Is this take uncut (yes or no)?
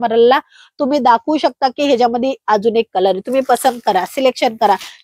yes